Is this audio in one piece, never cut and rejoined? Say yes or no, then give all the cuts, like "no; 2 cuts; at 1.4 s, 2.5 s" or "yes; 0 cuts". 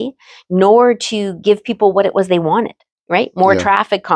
no; 1 cut; at 2.9 s